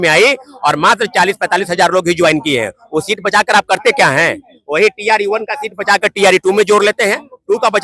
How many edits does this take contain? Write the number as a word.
zero